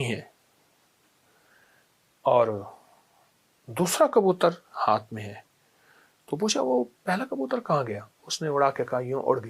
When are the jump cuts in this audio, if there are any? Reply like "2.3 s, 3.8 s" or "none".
none